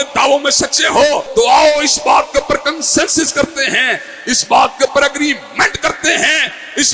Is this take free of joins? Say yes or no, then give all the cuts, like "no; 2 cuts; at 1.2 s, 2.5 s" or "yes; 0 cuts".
no; 1 cut; at 1.2 s